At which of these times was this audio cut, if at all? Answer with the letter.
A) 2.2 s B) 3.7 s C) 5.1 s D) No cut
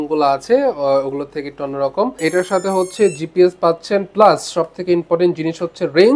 A